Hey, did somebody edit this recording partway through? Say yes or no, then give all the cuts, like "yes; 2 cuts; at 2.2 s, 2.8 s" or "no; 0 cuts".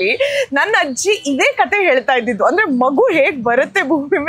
no; 0 cuts